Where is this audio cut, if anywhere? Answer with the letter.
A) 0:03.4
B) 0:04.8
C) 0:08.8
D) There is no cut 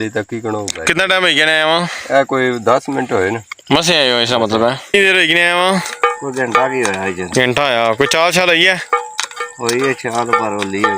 B